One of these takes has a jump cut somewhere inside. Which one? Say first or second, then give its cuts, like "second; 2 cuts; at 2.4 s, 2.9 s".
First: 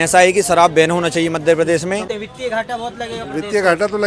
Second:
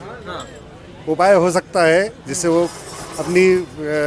first; 1 cut; at 2.1 s